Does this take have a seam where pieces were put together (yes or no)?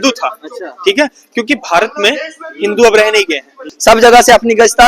yes